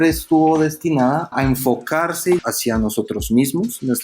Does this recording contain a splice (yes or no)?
yes